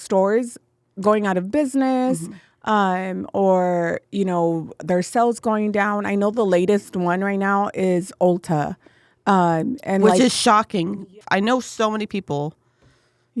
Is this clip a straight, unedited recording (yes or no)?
no